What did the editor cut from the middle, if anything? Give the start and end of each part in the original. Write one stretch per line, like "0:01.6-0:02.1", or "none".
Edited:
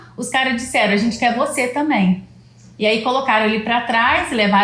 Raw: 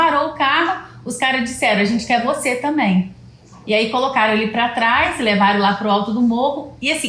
none